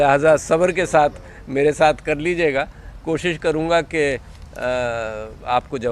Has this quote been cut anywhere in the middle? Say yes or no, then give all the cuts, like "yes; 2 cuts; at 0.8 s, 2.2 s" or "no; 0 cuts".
yes; 1 cut; at 2.0 s